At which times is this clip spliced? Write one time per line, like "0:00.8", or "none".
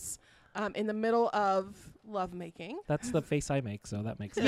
0:02.7